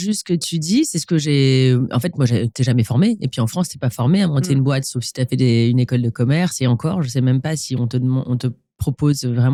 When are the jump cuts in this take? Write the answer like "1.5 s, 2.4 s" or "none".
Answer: none